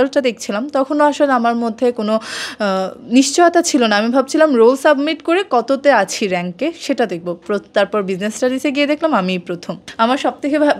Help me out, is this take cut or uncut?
uncut